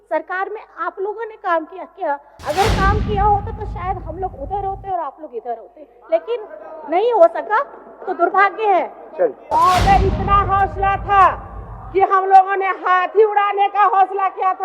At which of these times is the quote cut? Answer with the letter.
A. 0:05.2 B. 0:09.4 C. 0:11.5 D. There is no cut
B